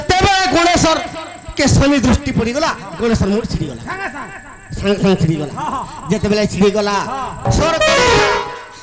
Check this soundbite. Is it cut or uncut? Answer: cut